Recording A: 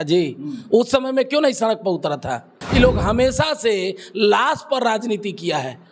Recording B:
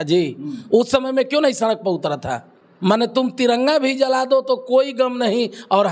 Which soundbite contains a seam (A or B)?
A